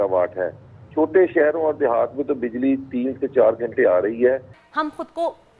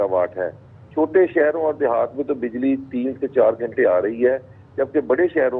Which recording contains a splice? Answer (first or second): first